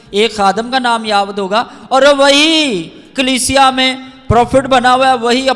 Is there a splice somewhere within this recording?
no; 0 cuts

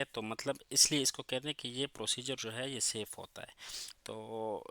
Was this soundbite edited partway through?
no; 0 cuts

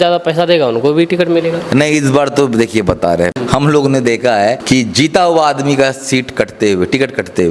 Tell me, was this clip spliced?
yes; 2 cuts; at 3.3 s, 4.6 s

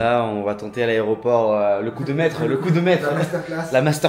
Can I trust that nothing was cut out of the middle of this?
yes; 0 cuts

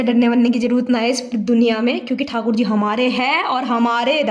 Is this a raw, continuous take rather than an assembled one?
yes; 0 cuts

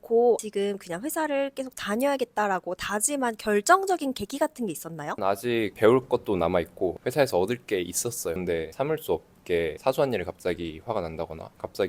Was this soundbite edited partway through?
yes; 1 cut; at 8.4 s

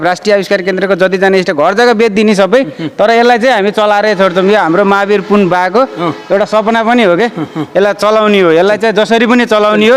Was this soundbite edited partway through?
no; 0 cuts

